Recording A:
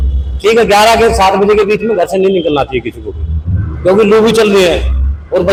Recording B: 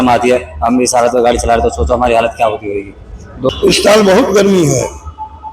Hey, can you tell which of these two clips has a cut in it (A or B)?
B